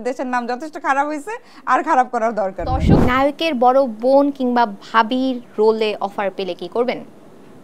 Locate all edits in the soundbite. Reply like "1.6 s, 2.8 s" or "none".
2.9 s